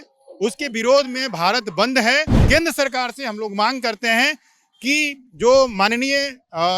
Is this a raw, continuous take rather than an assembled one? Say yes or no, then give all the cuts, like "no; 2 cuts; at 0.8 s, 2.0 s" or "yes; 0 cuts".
no; 1 cut; at 2.4 s